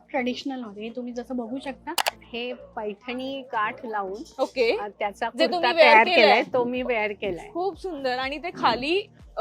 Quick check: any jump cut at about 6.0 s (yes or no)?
no